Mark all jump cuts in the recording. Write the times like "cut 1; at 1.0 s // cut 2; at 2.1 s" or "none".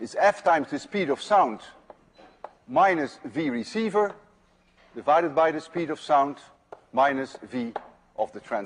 none